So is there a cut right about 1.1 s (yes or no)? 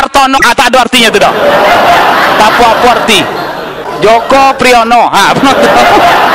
no